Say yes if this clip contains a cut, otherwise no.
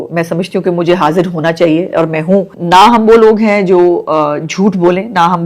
yes